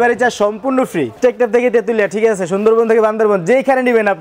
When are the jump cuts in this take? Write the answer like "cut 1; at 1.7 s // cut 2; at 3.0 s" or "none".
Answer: cut 1; at 1.2 s